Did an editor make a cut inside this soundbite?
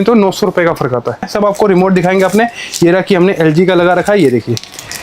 yes; 1 cut; at 1.3 s

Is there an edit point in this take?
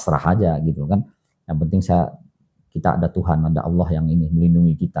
no; 0 cuts

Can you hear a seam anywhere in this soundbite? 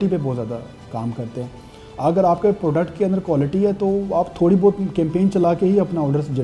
no; 0 cuts

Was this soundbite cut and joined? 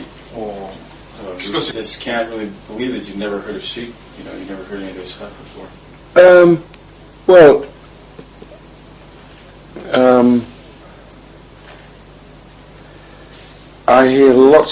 yes; 1 cut; at 1.9 s

